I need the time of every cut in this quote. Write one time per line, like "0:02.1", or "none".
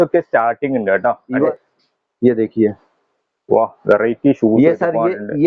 0:01.5